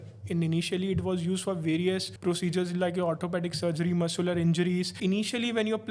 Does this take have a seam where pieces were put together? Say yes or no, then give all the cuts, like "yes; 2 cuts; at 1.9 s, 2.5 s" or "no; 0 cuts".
yes; 2 cuts; at 2.1 s, 4.9 s